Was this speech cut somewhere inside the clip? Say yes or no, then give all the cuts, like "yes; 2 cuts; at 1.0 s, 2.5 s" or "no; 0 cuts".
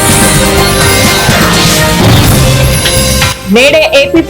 yes; 1 cut; at 3.3 s